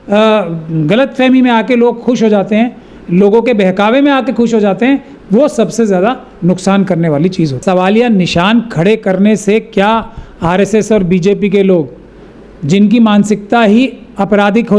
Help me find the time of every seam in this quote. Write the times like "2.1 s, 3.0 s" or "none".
7.6 s